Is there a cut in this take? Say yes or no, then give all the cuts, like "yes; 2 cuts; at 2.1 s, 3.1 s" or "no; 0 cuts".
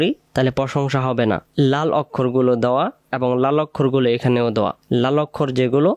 yes; 3 cuts; at 1.5 s, 3.0 s, 4.8 s